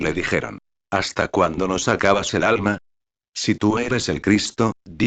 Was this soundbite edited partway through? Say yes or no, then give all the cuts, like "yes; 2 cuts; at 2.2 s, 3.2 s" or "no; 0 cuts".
no; 0 cuts